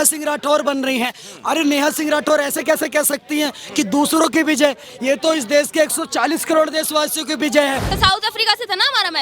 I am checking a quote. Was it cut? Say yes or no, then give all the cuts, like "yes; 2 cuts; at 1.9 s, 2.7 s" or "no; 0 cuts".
yes; 1 cut; at 7.9 s